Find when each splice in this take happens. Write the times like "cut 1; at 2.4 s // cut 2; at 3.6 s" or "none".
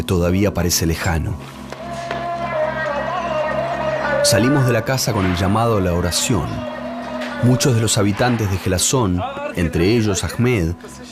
cut 1; at 5.4 s